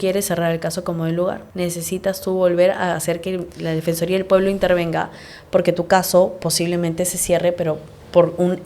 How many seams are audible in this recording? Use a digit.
1